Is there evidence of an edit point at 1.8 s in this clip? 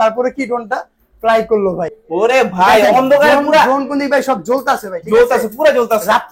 yes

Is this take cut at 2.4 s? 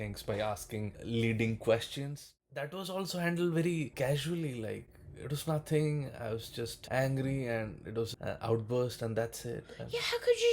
yes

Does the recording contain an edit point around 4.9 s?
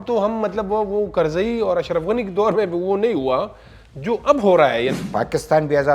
yes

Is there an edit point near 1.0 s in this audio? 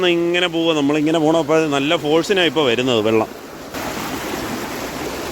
no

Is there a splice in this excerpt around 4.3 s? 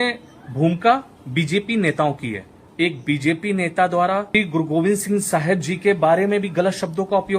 yes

